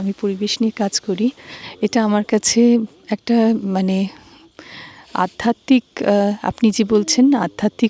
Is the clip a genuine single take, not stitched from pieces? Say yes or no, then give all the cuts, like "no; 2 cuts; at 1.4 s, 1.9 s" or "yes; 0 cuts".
yes; 0 cuts